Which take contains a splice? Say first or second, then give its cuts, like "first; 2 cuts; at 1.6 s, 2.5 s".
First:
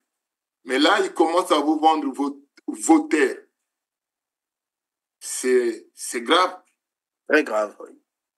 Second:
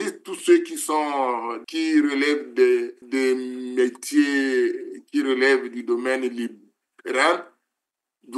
second; 2 cuts; at 1.6 s, 3.0 s